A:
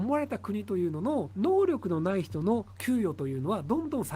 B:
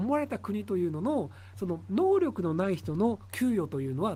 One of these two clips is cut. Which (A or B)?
A